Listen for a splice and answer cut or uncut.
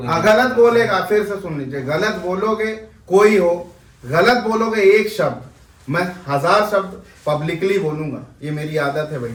uncut